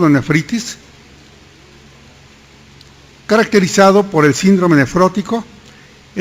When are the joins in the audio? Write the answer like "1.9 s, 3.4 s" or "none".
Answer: 5.2 s